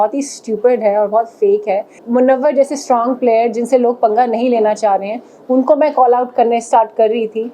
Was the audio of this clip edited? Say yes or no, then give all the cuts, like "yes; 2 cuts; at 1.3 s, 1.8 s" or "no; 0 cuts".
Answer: yes; 1 cut; at 2.0 s